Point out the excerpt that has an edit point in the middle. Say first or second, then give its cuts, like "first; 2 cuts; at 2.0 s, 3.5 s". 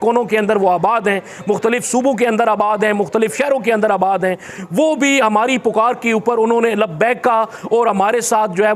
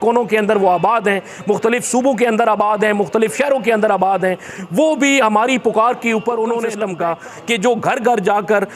second; 1 cut; at 6.8 s